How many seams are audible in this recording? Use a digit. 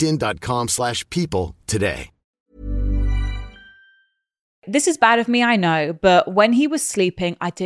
1